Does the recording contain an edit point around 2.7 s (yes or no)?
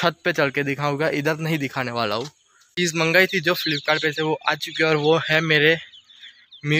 yes